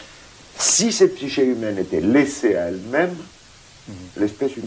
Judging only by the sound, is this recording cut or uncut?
cut